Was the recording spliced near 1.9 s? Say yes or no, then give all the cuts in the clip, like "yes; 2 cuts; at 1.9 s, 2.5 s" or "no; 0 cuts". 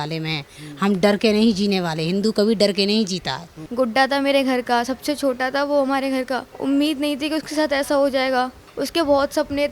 no; 3 cuts; at 3.6 s, 6.5 s, 8.6 s